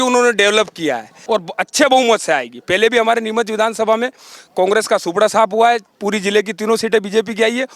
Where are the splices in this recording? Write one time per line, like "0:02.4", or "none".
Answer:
0:01.1